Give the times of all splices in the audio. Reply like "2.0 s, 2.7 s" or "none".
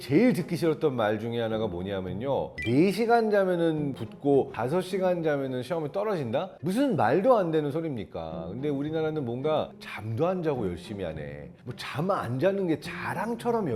none